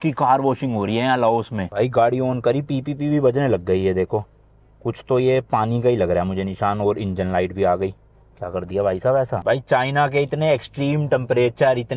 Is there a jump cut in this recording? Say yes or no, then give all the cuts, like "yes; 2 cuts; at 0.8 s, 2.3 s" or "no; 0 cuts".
yes; 2 cuts; at 1.6 s, 9.4 s